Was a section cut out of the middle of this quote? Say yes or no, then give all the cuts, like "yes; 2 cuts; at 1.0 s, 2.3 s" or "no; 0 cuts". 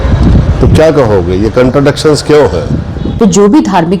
yes; 1 cut; at 3.0 s